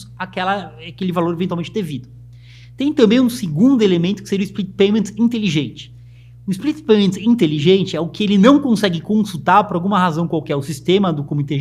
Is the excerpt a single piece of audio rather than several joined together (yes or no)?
yes